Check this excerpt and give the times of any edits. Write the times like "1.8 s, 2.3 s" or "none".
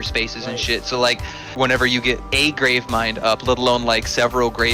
1.4 s